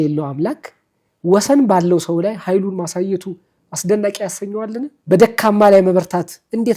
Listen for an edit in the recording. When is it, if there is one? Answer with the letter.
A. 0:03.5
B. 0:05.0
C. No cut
B